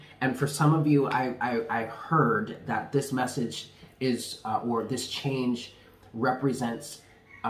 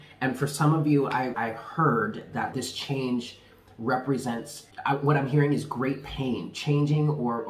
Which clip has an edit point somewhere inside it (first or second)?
second